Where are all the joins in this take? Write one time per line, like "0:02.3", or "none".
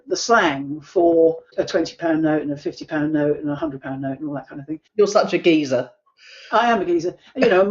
0:01.5
0:04.8